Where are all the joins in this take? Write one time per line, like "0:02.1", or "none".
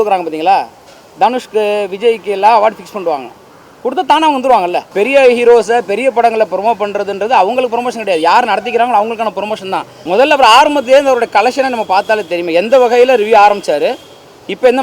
0:04.8
0:09.9